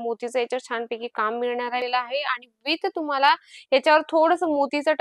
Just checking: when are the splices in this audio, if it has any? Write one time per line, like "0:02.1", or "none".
0:01.8